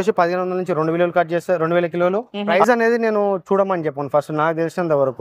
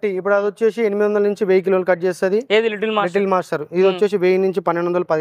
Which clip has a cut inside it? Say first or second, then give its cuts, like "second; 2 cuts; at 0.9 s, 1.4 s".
first; 1 cut; at 2.3 s